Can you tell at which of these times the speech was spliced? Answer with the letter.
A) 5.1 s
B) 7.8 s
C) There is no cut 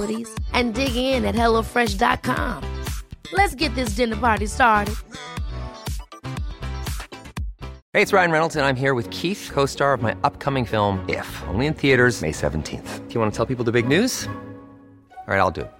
B